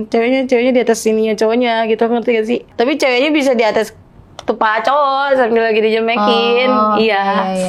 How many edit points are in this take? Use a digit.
1